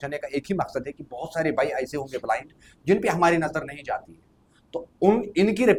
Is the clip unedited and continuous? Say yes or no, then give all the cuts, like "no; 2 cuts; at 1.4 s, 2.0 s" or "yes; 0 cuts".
yes; 0 cuts